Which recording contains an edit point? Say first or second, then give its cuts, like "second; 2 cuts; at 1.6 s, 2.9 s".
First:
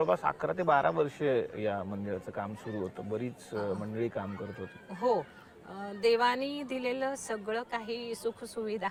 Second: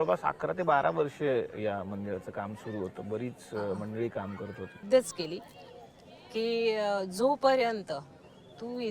second; 1 cut; at 4.8 s